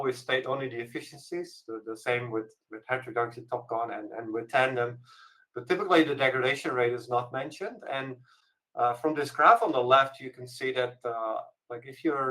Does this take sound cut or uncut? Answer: uncut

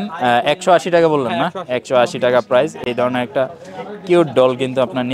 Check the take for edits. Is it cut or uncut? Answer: uncut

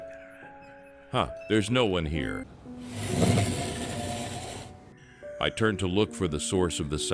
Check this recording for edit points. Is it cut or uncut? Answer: cut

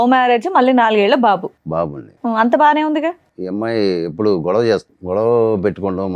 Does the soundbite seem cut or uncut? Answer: cut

